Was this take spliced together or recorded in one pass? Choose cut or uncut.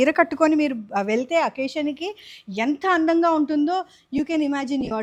uncut